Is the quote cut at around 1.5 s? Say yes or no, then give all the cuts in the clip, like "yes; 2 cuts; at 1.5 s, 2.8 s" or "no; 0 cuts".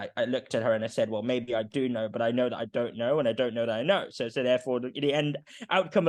no; 0 cuts